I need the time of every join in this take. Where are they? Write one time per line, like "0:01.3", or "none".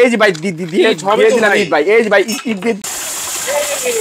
0:02.8